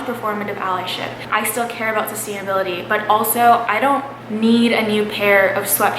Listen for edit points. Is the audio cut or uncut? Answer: cut